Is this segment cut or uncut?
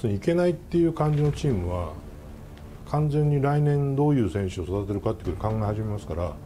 uncut